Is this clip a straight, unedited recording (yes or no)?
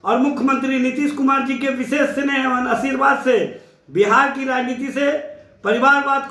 yes